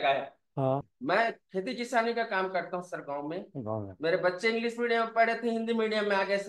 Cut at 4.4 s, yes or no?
no